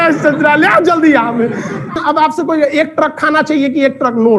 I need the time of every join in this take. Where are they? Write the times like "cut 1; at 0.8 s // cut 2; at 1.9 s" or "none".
cut 1; at 1.9 s